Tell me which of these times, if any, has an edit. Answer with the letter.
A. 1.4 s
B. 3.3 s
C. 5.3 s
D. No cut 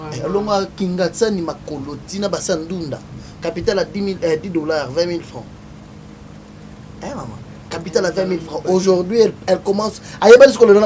D